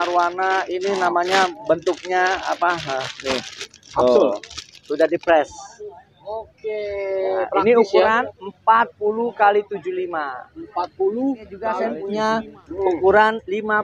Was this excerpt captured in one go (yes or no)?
no